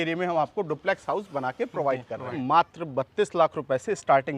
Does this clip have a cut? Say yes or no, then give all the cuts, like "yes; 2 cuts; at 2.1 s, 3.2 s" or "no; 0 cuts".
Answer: yes; 1 cut; at 2.4 s